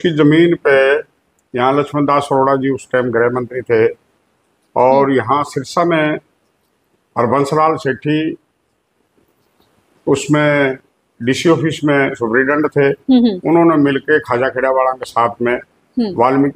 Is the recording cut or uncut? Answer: uncut